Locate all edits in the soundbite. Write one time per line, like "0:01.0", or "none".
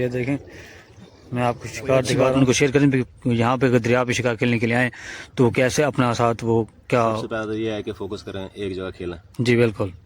0:02.3